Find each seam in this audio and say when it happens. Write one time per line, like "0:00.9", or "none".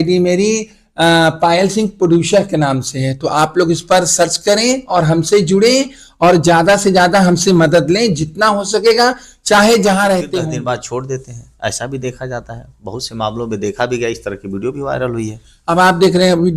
0:10.4